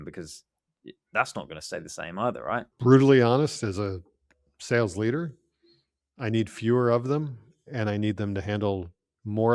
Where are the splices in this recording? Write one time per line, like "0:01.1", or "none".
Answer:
0:02.7